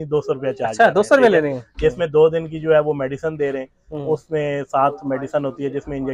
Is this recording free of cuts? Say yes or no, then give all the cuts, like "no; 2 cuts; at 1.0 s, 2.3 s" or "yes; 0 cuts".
yes; 0 cuts